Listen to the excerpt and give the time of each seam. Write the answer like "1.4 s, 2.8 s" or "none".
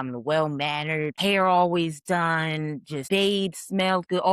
1.1 s, 2.9 s